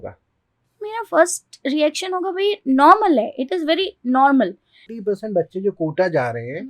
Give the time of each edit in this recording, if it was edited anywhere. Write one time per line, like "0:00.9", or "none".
0:04.8